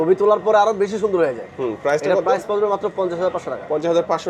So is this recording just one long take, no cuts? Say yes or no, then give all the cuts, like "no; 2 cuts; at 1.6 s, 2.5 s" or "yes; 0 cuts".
yes; 0 cuts